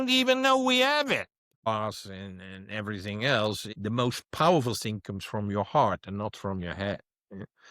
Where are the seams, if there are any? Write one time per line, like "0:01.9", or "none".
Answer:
0:01.7
0:03.7